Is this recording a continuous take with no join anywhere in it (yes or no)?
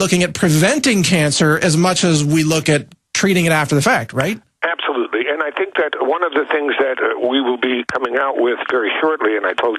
no